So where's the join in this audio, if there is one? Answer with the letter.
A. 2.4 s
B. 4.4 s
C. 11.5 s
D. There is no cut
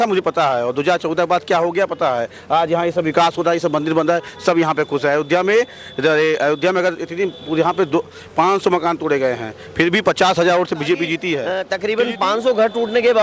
C